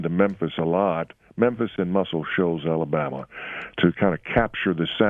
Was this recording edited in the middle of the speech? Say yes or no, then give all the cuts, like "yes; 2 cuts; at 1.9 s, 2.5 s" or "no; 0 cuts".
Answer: no; 0 cuts